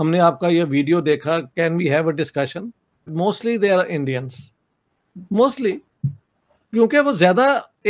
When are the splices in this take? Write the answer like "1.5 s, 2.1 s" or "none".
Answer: none